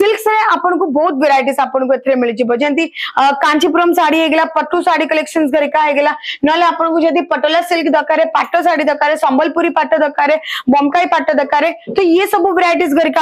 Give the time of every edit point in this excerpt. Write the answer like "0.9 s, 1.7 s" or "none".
none